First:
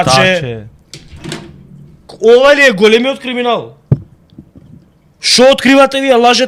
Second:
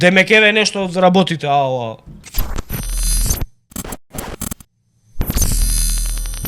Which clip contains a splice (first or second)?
second